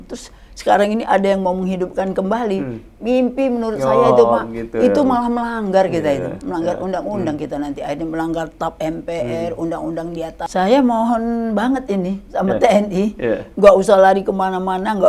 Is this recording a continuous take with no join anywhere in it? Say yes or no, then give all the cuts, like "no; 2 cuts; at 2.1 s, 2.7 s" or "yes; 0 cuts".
no; 1 cut; at 10.4 s